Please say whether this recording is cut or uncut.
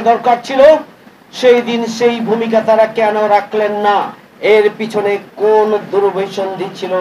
uncut